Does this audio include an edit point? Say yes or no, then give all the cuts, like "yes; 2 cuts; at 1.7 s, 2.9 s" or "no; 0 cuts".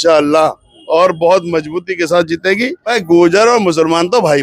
yes; 1 cut; at 2.9 s